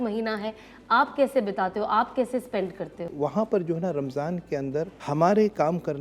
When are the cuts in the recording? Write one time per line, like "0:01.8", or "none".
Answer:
0:03.1
0:05.0